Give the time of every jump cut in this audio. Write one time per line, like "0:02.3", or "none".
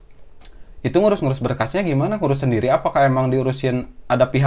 none